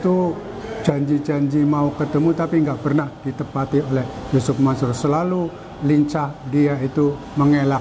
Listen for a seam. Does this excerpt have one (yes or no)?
no